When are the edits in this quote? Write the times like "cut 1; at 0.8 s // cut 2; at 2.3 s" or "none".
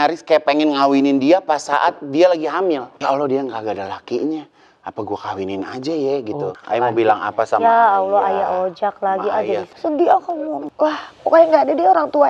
cut 1; at 2.9 s // cut 2; at 6.5 s // cut 3; at 9.7 s // cut 4; at 10.7 s